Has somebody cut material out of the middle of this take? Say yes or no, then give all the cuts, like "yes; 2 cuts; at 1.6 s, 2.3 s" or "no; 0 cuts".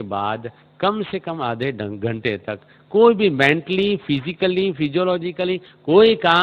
no; 0 cuts